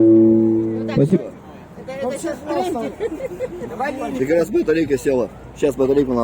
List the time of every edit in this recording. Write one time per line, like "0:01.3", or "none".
0:03.3

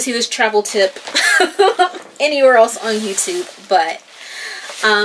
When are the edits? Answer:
none

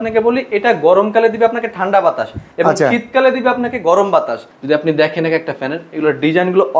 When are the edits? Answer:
0:04.4

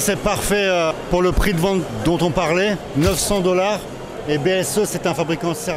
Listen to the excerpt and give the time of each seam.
0:01.0
0:01.9
0:02.8

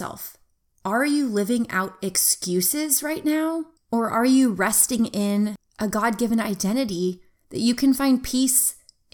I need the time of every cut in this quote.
0:03.7
0:05.6

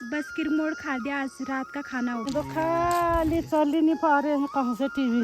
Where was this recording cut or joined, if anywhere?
0:02.3

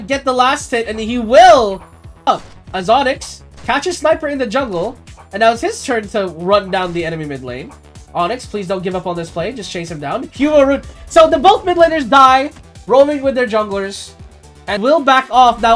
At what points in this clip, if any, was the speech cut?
0:02.3
0:14.8

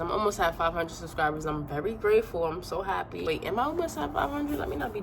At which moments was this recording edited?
0:03.1

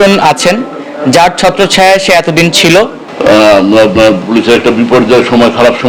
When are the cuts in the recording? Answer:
0:03.0

